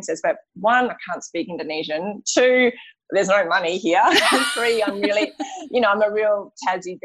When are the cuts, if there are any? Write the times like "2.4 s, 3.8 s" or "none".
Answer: none